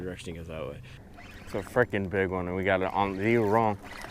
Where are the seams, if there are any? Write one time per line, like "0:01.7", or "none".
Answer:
0:01.0